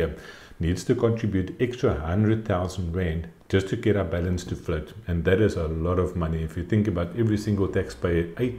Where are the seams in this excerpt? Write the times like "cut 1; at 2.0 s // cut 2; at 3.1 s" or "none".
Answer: none